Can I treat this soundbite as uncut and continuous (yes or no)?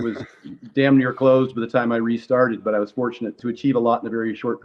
no